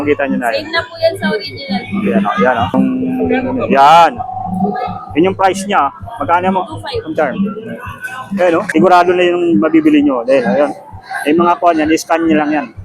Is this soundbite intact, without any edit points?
no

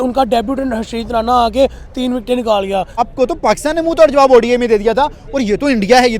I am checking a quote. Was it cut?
yes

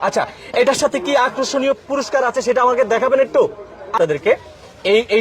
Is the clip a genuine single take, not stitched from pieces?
no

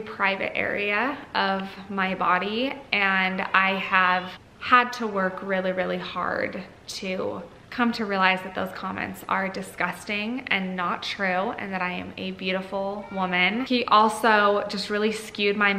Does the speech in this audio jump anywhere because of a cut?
no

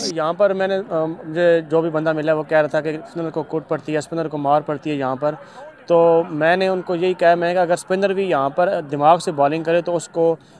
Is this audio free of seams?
yes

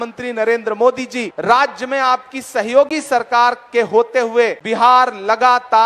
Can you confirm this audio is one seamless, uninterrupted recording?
no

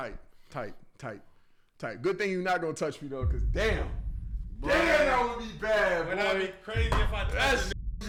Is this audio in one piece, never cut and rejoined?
yes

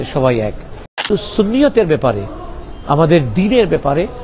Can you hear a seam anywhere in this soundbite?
yes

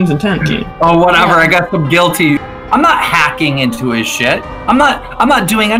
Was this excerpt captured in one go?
no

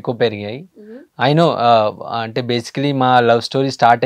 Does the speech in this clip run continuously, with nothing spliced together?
yes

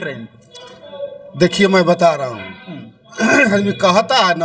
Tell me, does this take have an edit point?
no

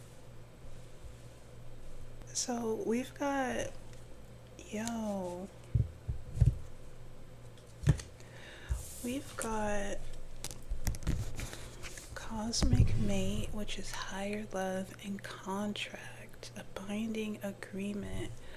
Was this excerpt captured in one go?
no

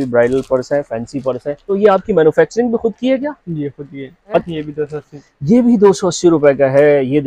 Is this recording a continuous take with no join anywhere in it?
no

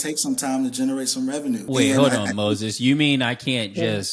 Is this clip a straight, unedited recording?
no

